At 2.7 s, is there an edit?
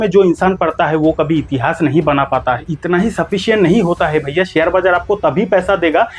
yes; 1 cut; at 2.7 s

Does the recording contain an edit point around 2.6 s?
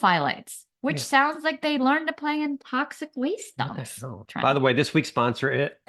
no; 1 cut; at 4.2 s

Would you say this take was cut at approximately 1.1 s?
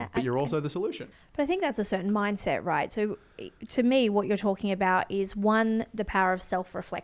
yes; 1 cut; at 1.1 s

